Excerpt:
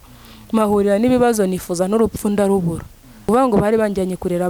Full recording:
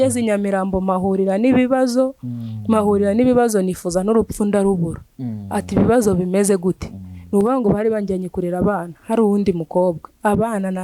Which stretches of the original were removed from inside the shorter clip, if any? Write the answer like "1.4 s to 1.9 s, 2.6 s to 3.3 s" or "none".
5.4 s to 7.4 s